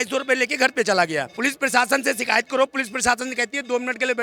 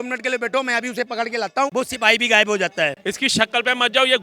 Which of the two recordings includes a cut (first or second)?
second